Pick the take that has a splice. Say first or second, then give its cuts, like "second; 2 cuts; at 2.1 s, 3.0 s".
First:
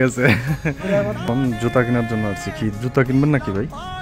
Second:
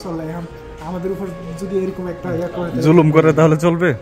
first; 1 cut; at 1.2 s